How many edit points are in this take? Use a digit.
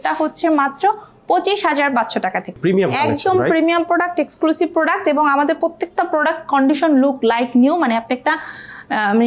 1